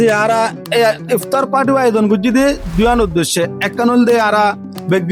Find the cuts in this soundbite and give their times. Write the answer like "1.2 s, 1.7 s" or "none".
none